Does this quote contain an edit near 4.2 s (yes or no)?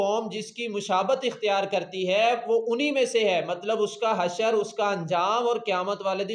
no